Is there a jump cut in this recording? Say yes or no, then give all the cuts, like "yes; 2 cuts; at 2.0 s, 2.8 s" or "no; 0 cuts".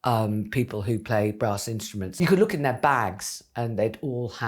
yes; 1 cut; at 2.1 s